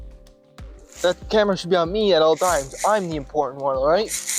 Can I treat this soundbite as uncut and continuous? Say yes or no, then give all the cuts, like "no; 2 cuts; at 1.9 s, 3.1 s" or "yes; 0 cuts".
no; 1 cut; at 1.0 s